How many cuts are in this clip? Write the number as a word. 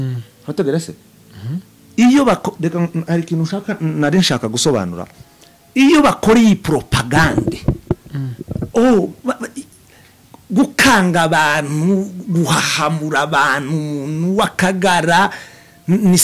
zero